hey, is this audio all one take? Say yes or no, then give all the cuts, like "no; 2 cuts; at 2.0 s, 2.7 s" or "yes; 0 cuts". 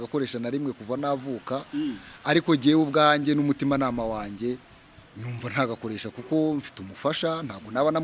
yes; 0 cuts